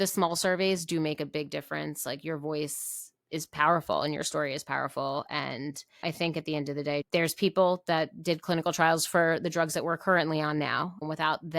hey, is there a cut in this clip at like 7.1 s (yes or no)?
yes